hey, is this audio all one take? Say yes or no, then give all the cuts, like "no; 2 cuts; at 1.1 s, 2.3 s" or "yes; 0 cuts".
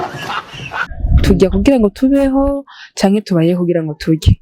no; 1 cut; at 0.9 s